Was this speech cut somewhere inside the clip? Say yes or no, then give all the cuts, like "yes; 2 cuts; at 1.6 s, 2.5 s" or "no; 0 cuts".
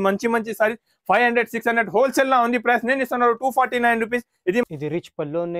yes; 1 cut; at 4.6 s